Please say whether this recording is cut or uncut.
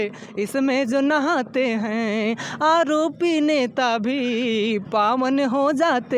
uncut